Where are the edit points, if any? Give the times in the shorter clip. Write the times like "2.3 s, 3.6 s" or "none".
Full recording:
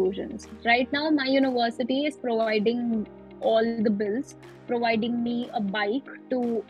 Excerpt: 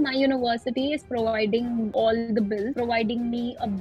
1.9 s, 2.7 s